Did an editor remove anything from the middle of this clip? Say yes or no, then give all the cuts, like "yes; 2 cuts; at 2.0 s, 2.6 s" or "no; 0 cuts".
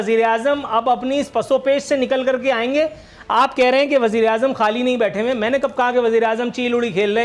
no; 0 cuts